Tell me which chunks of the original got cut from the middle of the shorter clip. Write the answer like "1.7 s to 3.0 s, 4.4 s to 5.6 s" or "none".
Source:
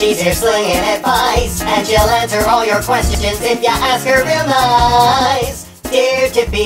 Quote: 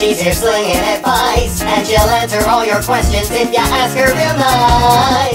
3.1 s to 3.2 s